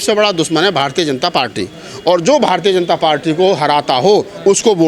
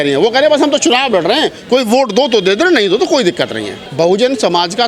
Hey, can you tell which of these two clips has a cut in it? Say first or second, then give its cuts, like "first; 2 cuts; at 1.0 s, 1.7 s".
second; 1 cut; at 3.8 s